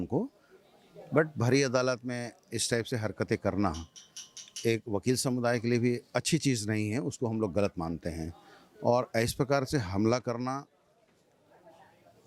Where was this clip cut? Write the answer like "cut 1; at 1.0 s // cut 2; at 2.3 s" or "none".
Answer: none

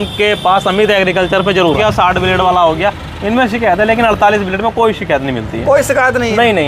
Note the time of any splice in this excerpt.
cut 1; at 1.8 s

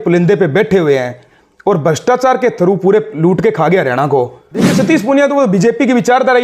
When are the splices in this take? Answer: cut 1; at 4.7 s

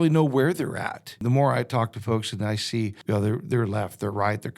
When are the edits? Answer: cut 1; at 1.2 s // cut 2; at 3.0 s

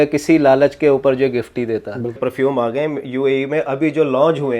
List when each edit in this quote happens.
cut 1; at 2.2 s

